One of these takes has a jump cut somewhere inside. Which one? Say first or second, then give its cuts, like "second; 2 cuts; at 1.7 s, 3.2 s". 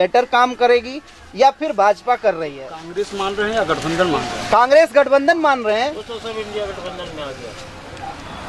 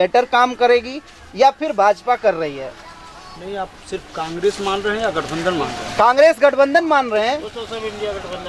first; 1 cut; at 2.7 s